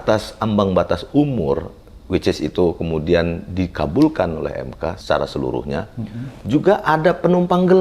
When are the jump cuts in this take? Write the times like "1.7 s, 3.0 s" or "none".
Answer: 5.0 s